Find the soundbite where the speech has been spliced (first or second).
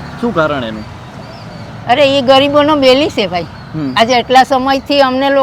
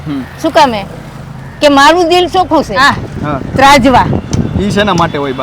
second